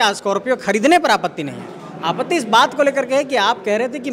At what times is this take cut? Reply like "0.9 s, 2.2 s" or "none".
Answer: none